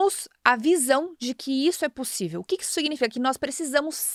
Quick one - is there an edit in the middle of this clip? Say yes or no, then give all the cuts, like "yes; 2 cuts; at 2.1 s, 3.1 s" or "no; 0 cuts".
no; 0 cuts